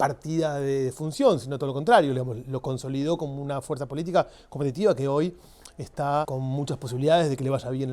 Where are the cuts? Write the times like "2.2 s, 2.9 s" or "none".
6.3 s

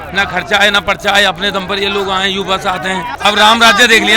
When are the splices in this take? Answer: 3.1 s

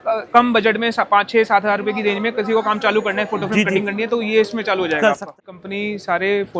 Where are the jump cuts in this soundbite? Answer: 5.4 s

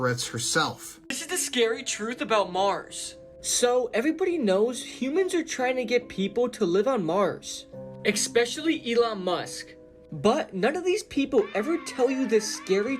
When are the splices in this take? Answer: 1.2 s

